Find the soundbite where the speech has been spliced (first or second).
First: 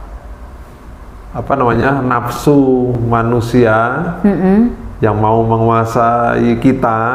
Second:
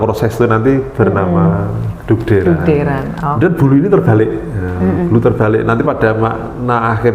second